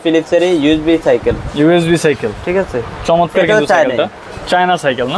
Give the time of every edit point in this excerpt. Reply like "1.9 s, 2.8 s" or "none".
none